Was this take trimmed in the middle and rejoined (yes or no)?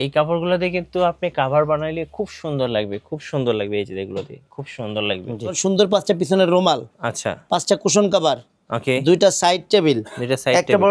yes